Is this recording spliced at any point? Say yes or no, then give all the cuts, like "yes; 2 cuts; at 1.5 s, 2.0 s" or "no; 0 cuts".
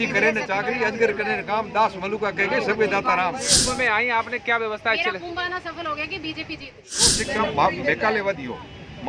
yes; 2 cuts; at 3.6 s, 7.2 s